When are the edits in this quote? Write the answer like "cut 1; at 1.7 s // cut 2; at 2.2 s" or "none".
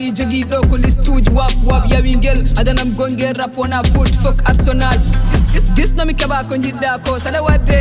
none